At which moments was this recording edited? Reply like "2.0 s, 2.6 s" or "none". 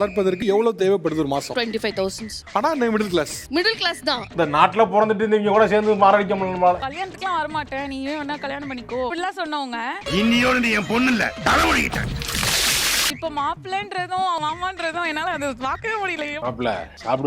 4.2 s, 6.8 s, 13.1 s, 16.4 s